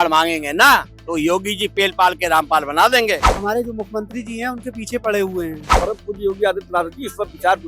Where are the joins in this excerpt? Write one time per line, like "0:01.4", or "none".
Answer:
0:03.3
0:05.6